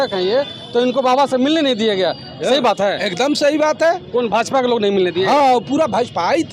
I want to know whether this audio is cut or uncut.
uncut